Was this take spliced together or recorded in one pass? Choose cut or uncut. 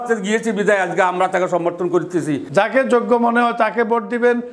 cut